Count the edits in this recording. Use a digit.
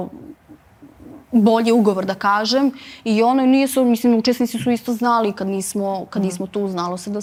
0